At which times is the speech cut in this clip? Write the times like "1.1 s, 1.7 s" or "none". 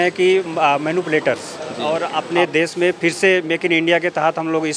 1.9 s